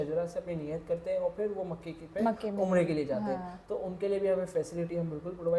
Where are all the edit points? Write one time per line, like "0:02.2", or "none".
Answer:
none